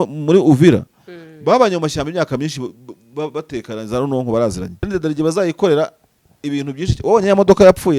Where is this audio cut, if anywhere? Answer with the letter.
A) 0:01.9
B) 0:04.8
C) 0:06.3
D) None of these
B